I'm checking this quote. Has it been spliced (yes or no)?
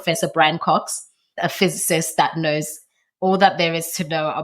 yes